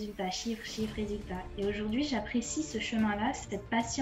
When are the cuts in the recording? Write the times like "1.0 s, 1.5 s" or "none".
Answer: none